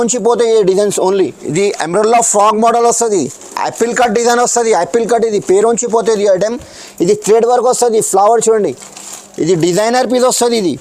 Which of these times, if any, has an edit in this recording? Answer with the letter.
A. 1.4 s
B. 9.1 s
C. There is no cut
A